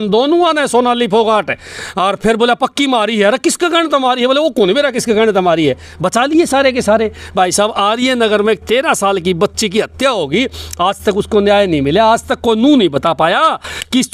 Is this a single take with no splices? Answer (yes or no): yes